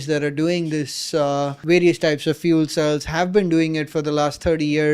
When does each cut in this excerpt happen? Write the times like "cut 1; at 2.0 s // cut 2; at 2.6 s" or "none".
cut 1; at 1.6 s

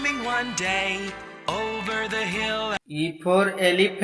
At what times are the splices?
cut 1; at 2.8 s

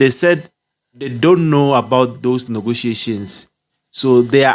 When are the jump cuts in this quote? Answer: cut 1; at 1.1 s

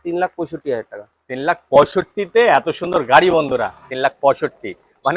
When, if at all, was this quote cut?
cut 1; at 3.8 s

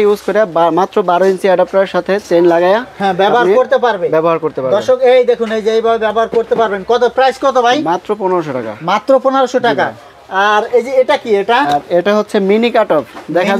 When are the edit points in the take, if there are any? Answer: none

